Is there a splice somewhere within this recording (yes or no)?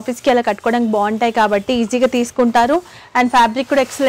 no